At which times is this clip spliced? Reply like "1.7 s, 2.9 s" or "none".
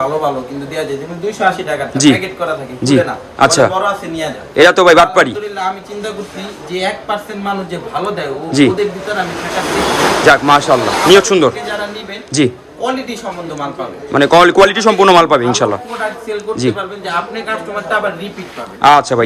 none